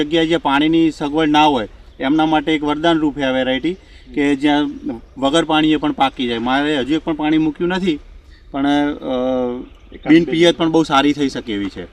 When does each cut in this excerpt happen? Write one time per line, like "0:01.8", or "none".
none